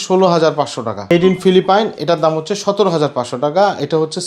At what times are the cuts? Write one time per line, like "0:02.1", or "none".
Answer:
0:01.1